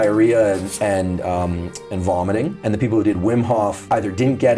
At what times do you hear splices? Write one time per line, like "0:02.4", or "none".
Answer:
none